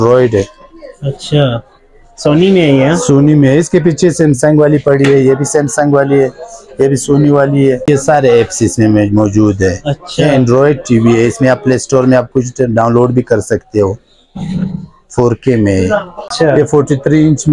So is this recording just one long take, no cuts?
no; 2 cuts; at 7.9 s, 16.3 s

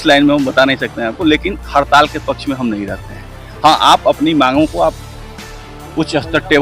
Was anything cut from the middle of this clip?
no; 0 cuts

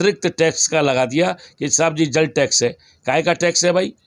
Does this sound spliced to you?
no; 0 cuts

